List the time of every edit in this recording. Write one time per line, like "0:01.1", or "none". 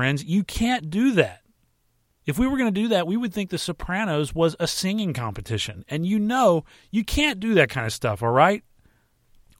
none